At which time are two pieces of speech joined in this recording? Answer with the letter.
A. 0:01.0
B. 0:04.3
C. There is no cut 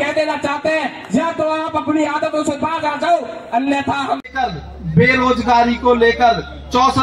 B